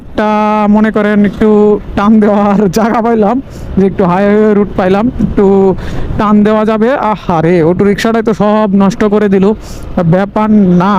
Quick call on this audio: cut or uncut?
uncut